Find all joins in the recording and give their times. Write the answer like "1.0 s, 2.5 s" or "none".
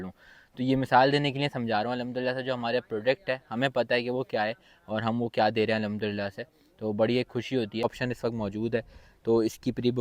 7.8 s